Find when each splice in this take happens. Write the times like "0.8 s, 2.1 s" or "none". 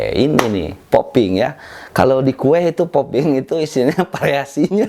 none